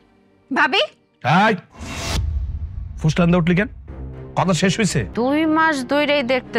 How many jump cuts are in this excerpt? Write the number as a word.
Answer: one